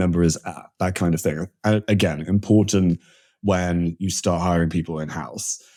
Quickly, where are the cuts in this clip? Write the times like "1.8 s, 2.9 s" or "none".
none